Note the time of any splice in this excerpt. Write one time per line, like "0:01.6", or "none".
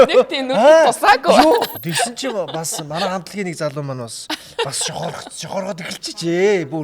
0:01.8